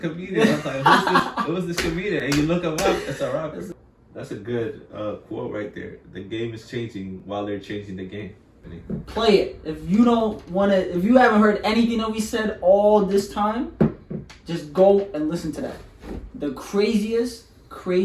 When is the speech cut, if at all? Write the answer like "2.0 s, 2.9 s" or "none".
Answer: 3.7 s, 8.7 s